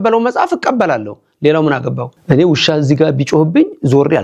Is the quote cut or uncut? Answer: cut